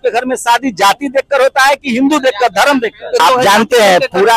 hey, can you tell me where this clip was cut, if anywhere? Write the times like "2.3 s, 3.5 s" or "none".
3.2 s